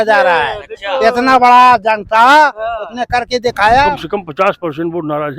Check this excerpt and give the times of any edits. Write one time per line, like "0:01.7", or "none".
0:04.0